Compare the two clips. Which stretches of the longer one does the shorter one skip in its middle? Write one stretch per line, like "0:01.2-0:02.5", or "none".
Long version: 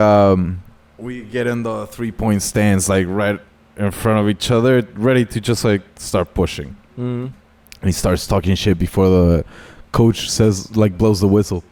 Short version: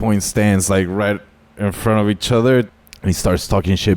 0:04.9-0:07.5